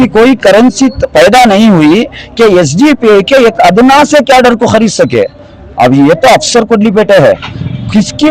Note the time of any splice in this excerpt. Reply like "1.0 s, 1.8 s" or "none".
none